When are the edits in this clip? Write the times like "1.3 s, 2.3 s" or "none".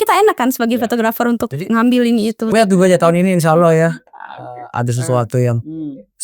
2.5 s